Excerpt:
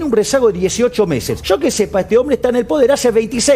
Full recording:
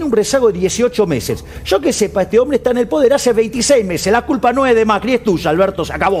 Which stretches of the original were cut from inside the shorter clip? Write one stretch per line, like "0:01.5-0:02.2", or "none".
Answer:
0:01.3-0:01.5